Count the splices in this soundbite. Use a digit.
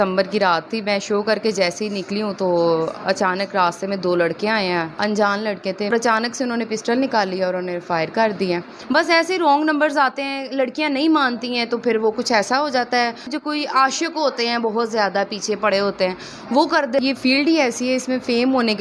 5